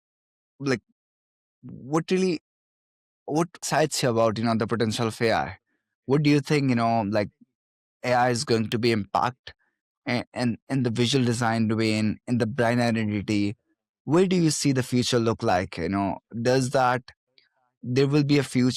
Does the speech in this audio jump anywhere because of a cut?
yes; 1 cut; at 3.6 s

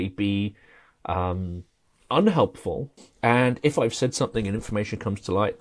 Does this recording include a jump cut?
yes; 1 cut; at 2.9 s

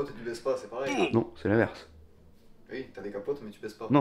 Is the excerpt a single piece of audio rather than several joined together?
no; 1 cut; at 1.0 s

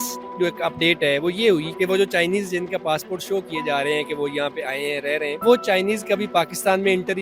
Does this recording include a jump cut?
yes; 2 cuts; at 1.7 s, 5.4 s

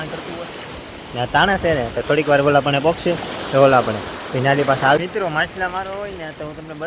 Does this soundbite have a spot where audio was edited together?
yes; 1 cut; at 5.0 s

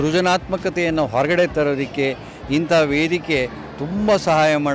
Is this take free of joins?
yes; 0 cuts

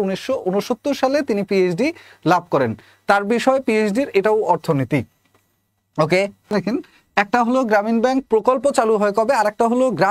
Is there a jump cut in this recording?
yes; 1 cut; at 6.5 s

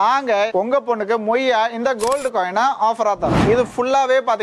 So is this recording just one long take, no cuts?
no; 1 cut; at 3.4 s

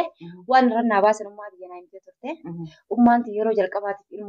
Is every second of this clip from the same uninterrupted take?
yes; 0 cuts

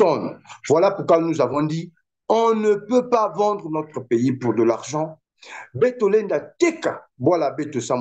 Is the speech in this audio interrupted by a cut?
no; 0 cuts

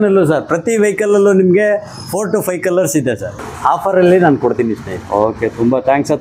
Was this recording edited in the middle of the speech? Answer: yes; 1 cut; at 3.5 s

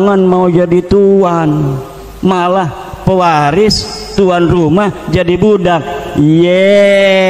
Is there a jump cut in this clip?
no; 0 cuts

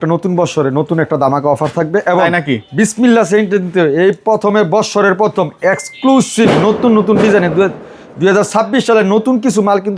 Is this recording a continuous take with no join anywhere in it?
yes; 0 cuts

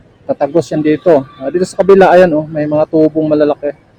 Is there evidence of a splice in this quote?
no; 0 cuts

